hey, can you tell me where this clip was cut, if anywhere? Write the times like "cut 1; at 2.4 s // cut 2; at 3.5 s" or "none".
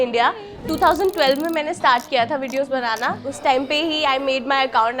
cut 1; at 3.3 s